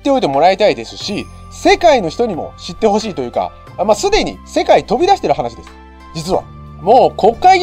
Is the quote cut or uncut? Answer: uncut